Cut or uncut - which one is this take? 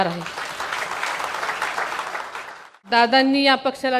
cut